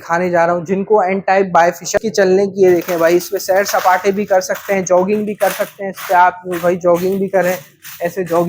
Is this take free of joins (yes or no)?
no